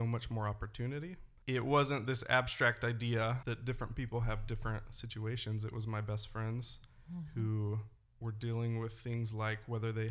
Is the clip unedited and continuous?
no; 2 cuts; at 1.3 s, 3.4 s

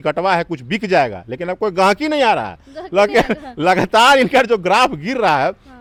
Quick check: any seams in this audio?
no; 0 cuts

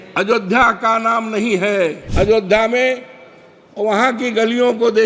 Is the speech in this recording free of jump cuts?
no; 1 cut; at 2.0 s

